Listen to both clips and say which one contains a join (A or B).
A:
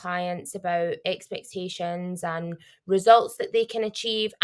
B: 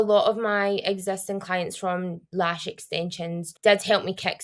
B